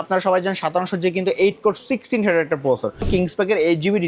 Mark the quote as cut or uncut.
cut